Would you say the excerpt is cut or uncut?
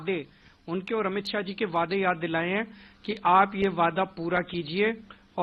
uncut